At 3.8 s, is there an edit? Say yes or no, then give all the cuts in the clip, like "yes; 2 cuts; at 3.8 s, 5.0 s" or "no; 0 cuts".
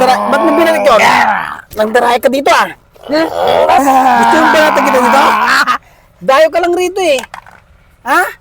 yes; 1 cut; at 3.8 s